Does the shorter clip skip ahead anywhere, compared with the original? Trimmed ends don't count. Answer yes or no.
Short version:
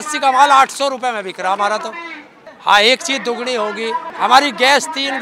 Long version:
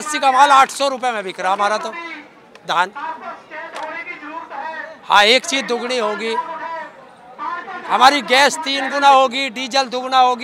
yes